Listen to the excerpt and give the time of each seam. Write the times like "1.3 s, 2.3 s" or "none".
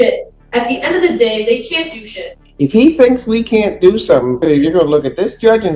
2.4 s, 4.4 s